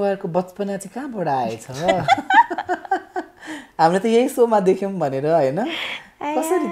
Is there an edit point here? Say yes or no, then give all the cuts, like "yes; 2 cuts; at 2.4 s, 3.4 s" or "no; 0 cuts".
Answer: no; 0 cuts